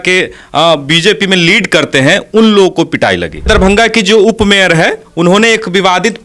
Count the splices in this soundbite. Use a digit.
1